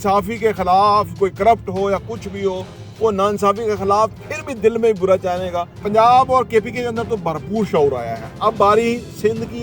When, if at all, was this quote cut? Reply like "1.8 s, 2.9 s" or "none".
5.7 s

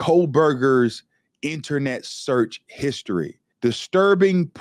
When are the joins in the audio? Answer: 3.4 s

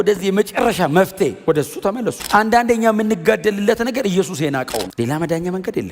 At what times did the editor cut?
2.1 s, 4.8 s

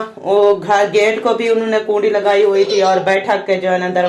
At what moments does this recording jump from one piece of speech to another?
none

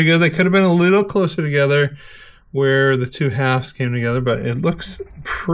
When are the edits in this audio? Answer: none

